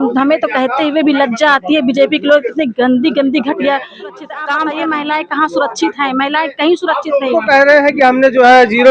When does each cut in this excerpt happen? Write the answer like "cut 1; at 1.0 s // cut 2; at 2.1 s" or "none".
cut 1; at 4.5 s